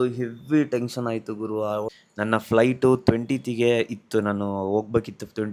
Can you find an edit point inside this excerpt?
yes; 1 cut; at 2.0 s

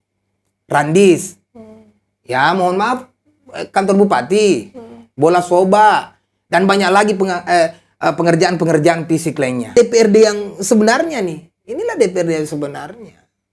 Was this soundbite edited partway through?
yes; 1 cut; at 9.7 s

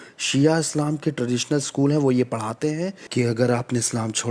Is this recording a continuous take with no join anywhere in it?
yes; 0 cuts

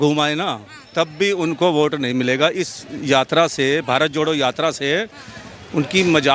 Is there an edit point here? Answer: no; 0 cuts

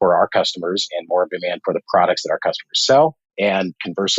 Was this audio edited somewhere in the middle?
yes; 1 cut; at 3.2 s

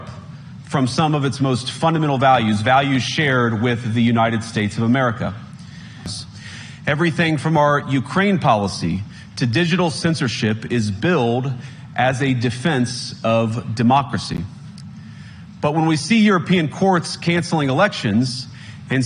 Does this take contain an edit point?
yes; 1 cut; at 6.2 s

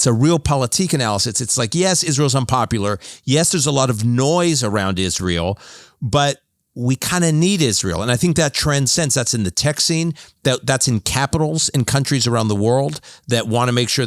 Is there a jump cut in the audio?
no; 0 cuts

